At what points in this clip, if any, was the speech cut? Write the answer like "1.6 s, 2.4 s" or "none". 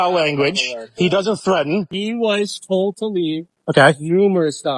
1.9 s